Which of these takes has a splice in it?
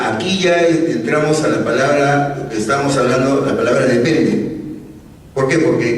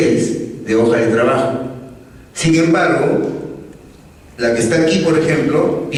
first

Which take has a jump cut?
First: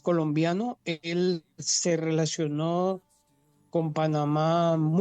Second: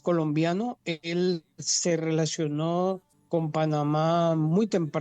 second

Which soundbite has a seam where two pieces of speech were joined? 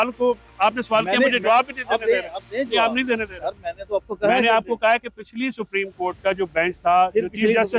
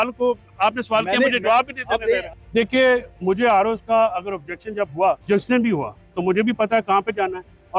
second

